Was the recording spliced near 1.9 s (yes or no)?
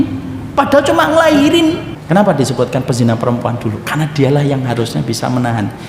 yes